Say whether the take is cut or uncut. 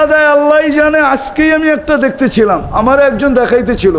uncut